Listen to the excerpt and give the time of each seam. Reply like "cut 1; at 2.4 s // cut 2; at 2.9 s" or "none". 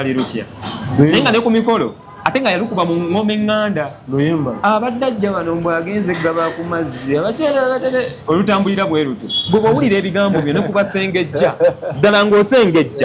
none